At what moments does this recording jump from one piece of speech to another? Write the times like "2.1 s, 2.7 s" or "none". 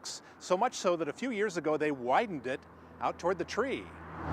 none